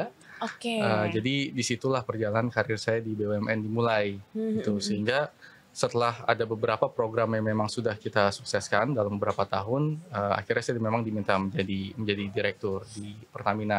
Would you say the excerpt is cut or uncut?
uncut